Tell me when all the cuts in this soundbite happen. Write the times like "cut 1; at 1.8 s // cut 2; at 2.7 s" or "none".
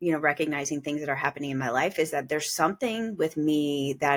none